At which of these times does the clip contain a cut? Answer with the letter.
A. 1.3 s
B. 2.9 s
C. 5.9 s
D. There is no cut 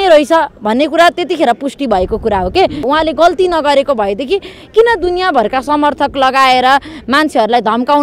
B